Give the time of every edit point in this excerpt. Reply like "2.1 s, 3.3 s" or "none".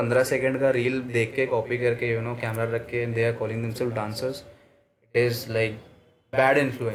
none